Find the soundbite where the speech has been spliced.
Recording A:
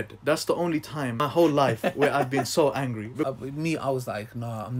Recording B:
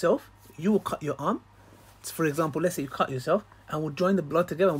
A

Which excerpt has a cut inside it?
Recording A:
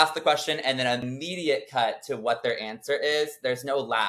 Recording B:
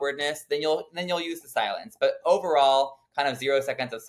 A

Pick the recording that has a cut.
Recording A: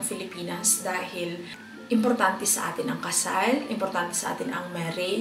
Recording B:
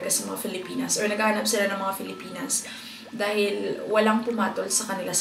A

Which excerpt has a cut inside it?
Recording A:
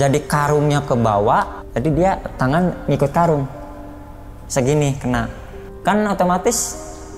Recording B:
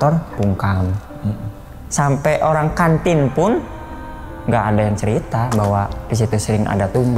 A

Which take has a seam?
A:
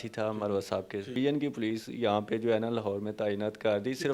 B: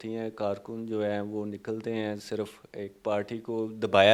A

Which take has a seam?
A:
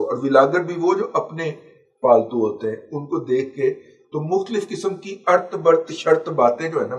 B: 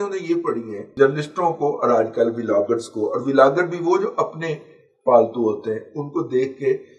B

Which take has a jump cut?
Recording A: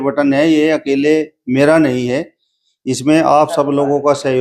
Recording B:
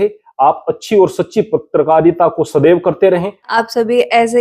B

